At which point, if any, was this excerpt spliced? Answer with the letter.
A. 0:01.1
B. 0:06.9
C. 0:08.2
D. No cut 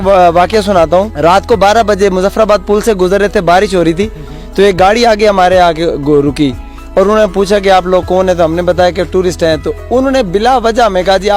A